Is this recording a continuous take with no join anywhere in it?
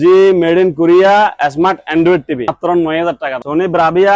no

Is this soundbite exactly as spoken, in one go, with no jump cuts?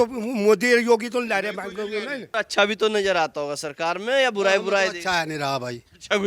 no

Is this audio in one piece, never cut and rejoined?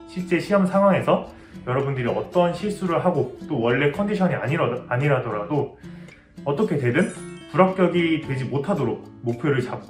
yes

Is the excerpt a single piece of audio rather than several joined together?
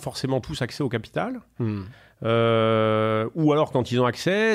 yes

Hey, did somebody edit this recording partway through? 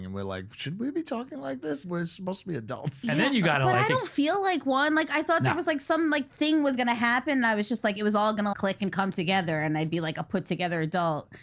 yes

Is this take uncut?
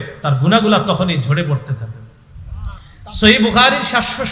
no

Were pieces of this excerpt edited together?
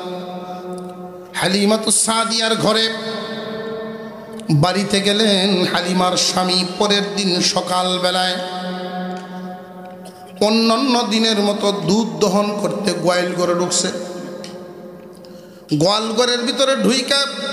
no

